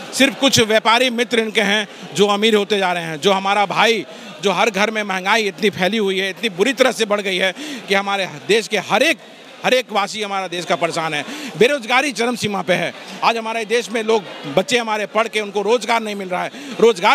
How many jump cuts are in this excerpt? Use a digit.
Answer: 0